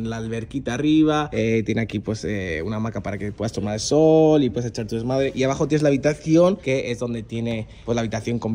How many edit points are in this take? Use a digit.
0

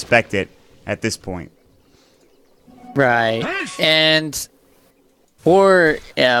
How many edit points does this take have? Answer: 1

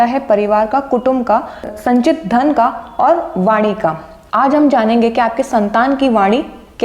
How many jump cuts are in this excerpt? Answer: 1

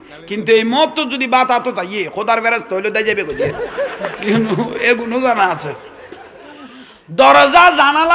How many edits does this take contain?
1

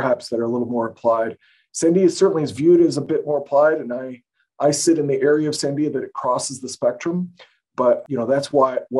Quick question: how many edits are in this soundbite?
1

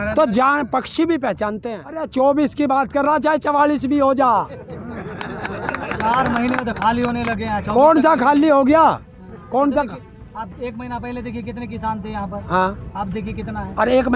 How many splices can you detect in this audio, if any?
1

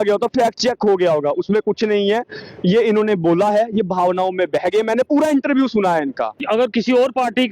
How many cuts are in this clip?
1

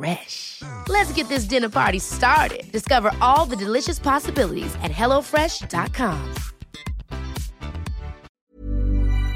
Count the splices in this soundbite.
1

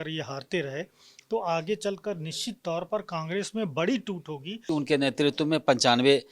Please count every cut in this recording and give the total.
1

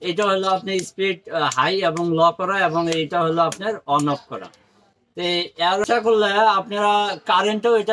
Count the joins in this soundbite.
1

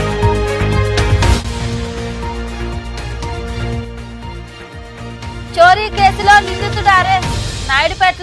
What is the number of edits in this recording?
1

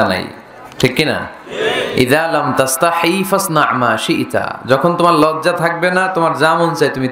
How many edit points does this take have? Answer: 0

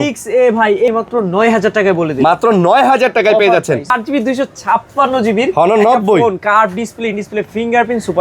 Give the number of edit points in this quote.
2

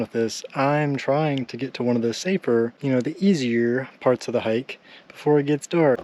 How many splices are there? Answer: 0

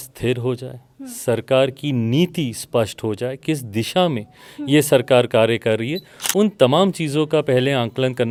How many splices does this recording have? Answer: 0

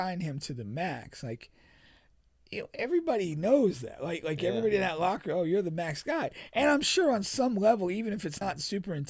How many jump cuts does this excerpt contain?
0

